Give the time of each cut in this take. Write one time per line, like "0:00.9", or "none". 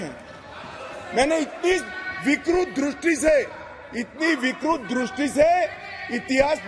none

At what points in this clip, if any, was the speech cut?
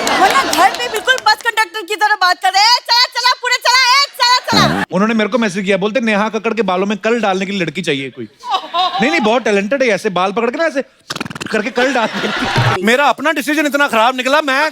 0:04.8
0:12.8

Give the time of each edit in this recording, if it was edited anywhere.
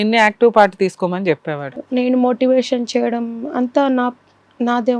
0:01.6

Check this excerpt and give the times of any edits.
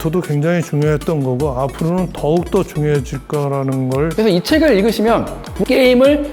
0:04.1
0:05.6

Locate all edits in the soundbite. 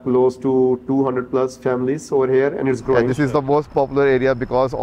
0:03.1

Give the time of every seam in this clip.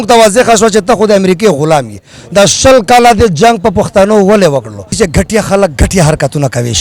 0:04.9

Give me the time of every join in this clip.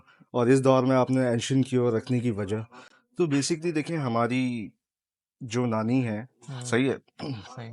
none

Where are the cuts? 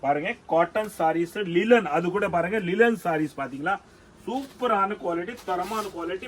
none

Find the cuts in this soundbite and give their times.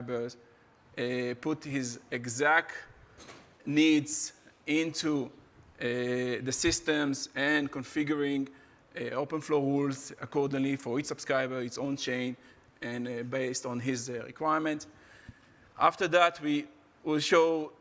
0:08.2

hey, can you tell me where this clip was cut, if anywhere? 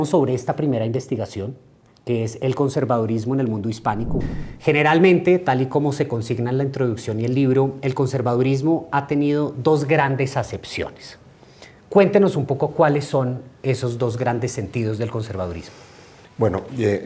0:04.2

